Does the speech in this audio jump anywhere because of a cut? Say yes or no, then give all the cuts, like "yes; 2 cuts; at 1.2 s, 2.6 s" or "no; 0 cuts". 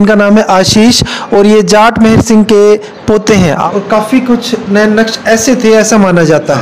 yes; 1 cut; at 3.6 s